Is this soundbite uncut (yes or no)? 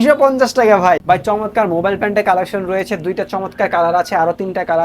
no